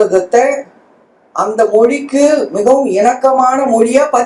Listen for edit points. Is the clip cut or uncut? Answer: uncut